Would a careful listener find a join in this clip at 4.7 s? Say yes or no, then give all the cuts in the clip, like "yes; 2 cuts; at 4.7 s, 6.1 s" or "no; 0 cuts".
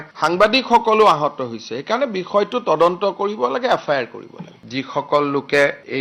yes; 1 cut; at 4.7 s